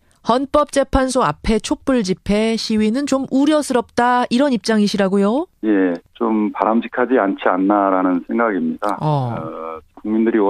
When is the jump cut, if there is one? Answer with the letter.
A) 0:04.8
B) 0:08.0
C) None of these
B